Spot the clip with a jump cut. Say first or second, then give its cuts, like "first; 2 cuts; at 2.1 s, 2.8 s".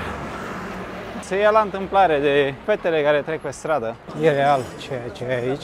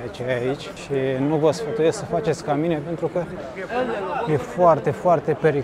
first; 3 cuts; at 1.2 s, 2.6 s, 4.1 s